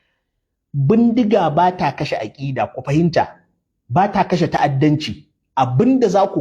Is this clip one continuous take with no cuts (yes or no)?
no